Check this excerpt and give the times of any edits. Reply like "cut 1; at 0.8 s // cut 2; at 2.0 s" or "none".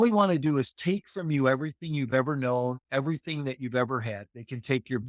none